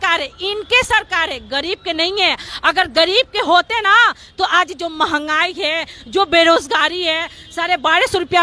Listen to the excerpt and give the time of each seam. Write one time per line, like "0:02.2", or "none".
none